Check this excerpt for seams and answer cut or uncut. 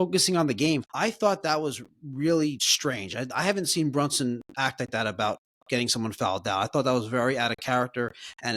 cut